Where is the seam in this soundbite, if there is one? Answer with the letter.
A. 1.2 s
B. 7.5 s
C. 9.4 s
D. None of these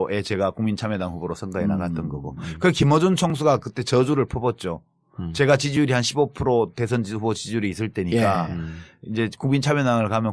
D